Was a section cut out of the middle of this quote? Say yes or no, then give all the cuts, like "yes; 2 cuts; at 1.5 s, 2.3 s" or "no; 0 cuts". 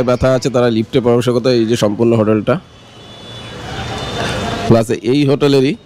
no; 0 cuts